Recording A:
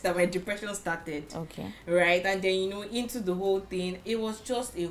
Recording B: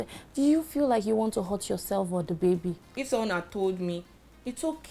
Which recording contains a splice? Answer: B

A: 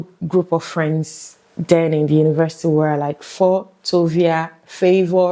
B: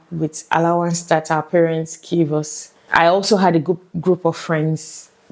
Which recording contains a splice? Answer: B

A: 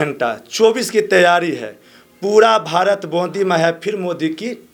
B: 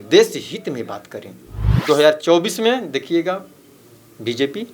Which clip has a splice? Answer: B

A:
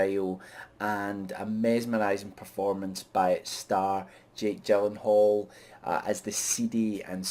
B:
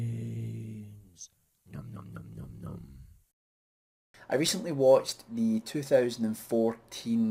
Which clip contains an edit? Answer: A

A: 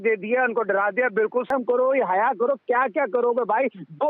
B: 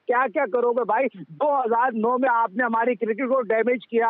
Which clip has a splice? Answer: A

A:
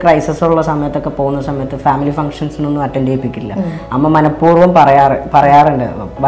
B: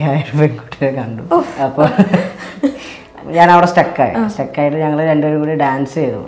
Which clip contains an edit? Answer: B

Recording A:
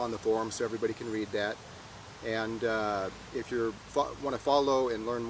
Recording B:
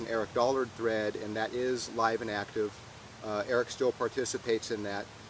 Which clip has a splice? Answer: A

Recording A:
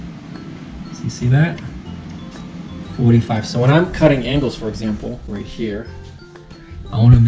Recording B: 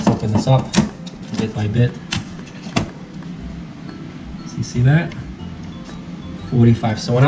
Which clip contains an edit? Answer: A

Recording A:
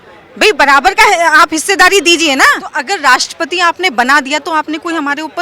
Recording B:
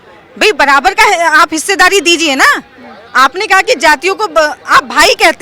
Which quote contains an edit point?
A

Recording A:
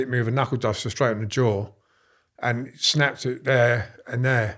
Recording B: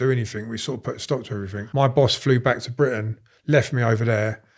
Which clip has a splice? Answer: B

